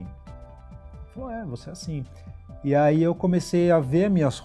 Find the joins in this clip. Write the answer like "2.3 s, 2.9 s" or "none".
none